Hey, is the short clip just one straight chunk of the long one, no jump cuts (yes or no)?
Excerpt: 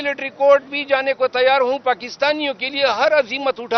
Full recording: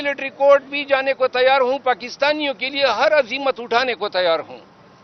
yes